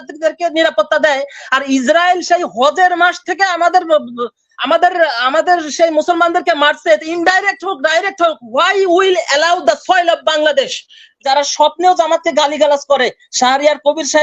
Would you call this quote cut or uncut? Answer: cut